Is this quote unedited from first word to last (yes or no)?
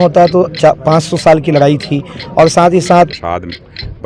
no